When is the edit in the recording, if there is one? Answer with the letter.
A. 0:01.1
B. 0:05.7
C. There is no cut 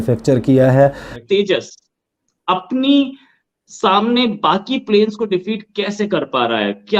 A